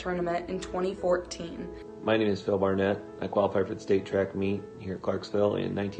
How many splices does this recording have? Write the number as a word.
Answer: one